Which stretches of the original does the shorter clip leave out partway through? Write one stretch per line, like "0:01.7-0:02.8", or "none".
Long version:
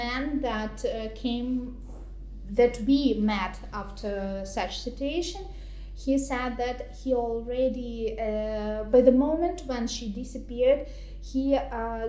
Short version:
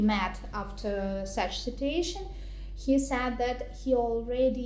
none